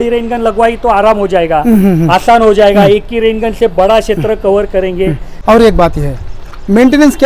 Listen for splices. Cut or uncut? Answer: cut